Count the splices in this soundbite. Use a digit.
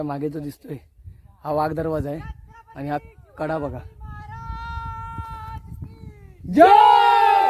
0